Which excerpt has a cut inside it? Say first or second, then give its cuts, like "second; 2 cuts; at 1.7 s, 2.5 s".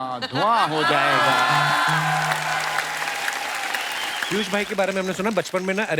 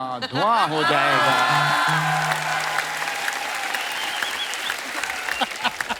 first; 1 cut; at 4.2 s